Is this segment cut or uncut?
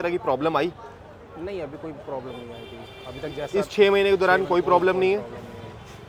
uncut